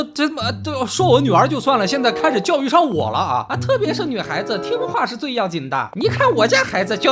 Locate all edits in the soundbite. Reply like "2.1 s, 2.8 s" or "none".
none